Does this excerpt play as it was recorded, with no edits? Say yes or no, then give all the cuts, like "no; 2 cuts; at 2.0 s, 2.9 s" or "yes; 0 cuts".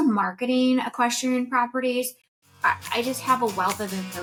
yes; 0 cuts